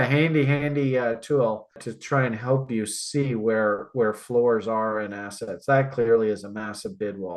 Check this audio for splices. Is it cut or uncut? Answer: uncut